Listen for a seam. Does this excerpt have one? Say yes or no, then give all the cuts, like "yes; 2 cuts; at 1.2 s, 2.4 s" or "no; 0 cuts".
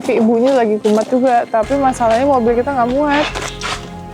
no; 0 cuts